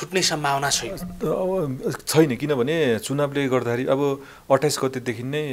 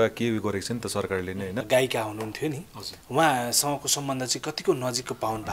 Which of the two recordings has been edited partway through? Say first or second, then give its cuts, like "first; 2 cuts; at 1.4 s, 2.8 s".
second; 1 cut; at 1.6 s